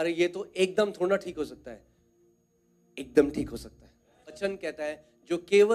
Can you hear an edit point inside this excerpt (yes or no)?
yes